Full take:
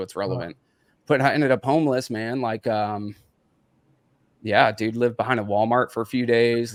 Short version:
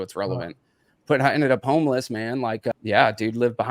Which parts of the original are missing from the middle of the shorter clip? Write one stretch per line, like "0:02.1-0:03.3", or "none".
0:02.7-0:04.3